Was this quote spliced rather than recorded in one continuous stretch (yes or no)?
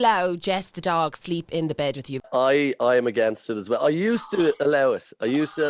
yes